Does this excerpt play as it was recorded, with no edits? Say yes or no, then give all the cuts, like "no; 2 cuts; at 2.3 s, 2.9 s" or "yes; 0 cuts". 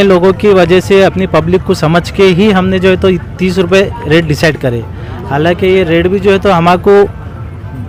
yes; 0 cuts